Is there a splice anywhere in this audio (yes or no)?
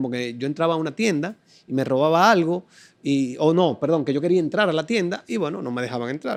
no